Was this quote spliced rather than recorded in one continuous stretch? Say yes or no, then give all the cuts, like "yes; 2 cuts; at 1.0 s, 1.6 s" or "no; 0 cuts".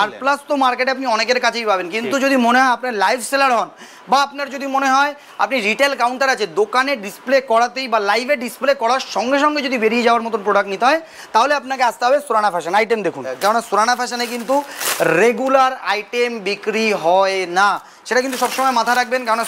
yes; 1 cut; at 13.3 s